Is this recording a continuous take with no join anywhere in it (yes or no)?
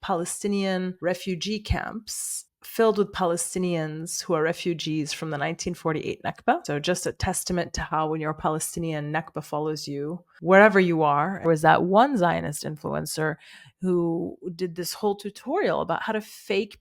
no